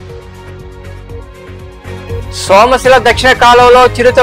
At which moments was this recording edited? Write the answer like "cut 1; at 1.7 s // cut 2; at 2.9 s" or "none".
none